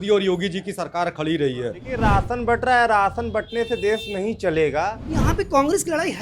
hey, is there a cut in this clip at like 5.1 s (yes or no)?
yes